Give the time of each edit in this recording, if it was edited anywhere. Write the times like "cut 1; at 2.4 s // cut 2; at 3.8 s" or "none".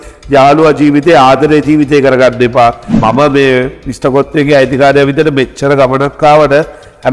cut 1; at 3.0 s